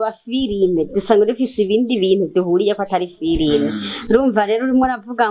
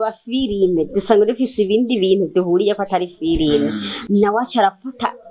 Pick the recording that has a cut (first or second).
second